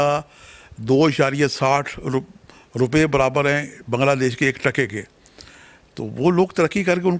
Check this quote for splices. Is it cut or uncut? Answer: uncut